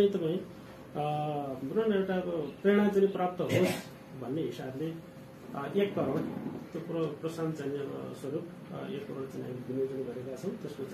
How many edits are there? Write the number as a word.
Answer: zero